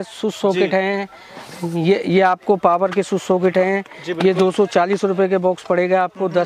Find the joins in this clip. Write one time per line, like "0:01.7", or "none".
none